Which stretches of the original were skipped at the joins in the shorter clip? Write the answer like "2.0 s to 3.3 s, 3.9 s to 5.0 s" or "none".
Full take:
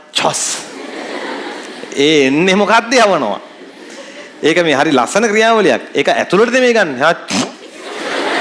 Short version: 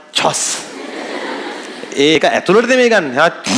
2.2 s to 6.0 s